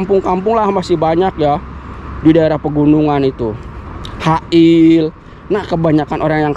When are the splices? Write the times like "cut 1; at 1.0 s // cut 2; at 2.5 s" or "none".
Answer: none